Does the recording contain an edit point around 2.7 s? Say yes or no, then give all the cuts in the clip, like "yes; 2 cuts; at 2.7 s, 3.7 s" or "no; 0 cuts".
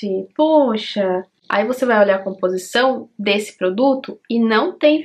no; 1 cut; at 1.4 s